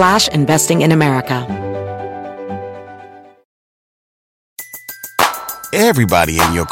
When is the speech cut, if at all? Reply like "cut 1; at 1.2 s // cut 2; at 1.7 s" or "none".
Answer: cut 1; at 1.4 s